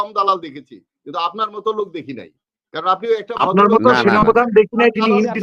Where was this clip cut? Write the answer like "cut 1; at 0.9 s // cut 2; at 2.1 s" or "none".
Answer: none